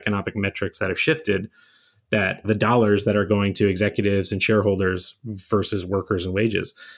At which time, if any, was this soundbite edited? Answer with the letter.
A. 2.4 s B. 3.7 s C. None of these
A